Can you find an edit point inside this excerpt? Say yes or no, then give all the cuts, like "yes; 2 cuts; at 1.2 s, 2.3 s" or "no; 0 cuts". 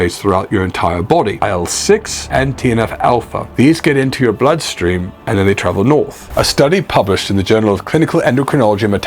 yes; 2 cuts; at 1.4 s, 6.2 s